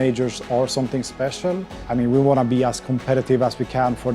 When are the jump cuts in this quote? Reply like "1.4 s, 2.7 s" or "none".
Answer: 1.7 s